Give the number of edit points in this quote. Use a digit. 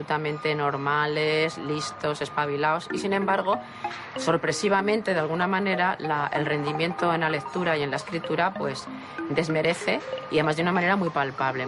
0